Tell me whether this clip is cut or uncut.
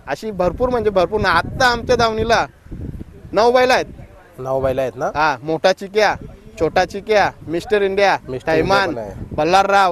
uncut